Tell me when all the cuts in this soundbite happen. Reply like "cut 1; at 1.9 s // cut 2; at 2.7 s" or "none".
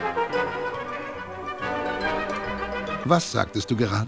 cut 1; at 3.0 s